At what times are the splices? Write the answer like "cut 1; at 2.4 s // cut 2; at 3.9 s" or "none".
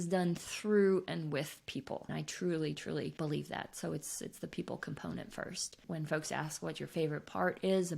none